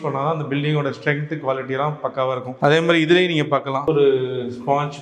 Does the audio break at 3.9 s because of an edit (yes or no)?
yes